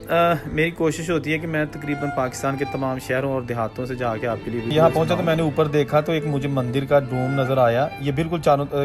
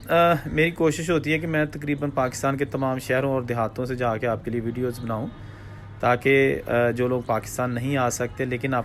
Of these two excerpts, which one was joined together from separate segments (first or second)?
first